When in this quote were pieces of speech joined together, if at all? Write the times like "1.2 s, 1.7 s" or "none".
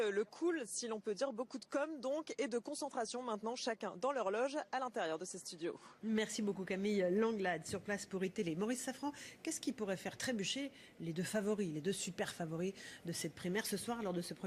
8.8 s